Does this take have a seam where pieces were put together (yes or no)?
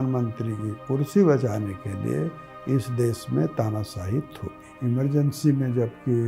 yes